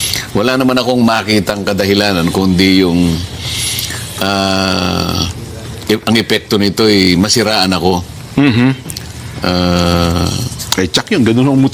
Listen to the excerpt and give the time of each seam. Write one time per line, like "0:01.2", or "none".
0:10.1